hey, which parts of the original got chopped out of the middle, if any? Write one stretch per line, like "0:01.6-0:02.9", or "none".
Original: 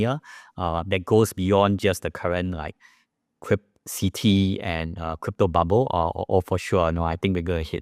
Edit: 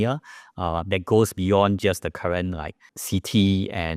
0:02.9-0:03.8